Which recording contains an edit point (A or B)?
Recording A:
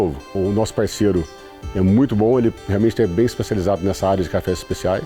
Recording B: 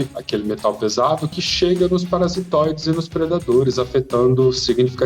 B